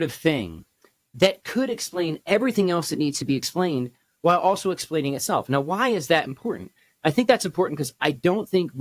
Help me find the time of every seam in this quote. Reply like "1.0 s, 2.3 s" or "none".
none

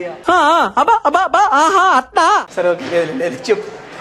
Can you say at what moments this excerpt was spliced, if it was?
none

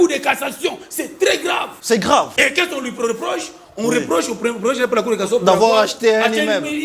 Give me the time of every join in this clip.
1.7 s, 2.3 s

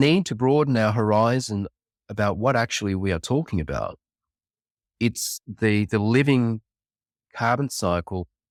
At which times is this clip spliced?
none

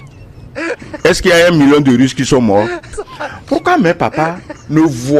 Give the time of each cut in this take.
3.0 s

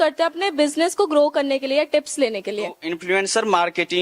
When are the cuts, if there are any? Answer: 2.8 s

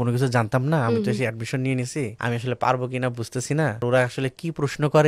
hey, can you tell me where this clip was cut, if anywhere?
2.1 s, 3.8 s

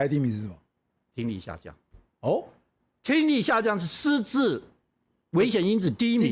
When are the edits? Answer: none

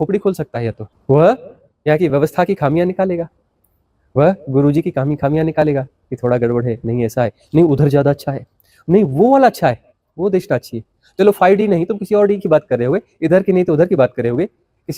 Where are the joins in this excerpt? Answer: 0.9 s

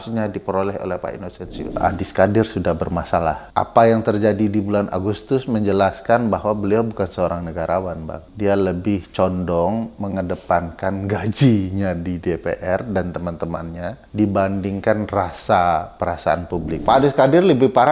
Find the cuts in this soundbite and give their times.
1.8 s, 3.4 s, 8.2 s, 14.0 s, 16.7 s

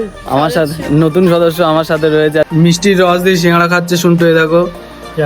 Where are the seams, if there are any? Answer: 2.5 s

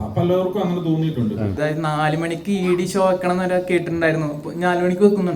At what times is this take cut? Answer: 1.6 s

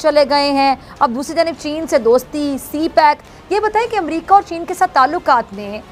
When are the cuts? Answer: none

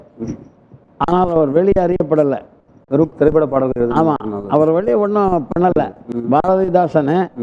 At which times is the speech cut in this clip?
6.1 s

